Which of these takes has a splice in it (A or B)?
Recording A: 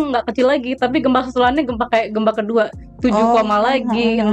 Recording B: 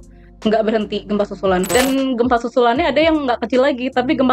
B